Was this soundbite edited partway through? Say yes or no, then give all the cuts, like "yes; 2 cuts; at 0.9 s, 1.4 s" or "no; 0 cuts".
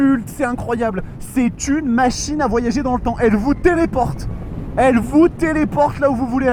no; 0 cuts